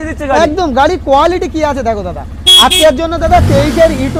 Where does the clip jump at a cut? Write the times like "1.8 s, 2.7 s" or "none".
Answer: none